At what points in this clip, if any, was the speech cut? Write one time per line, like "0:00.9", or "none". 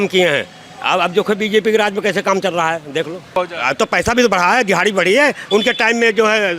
0:03.3